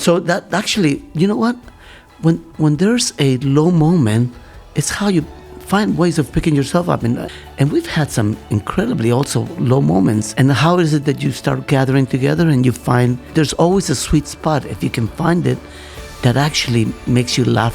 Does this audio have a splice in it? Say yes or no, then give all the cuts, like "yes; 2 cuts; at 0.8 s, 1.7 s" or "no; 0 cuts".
yes; 3 cuts; at 7.2 s, 10.3 s, 13.2 s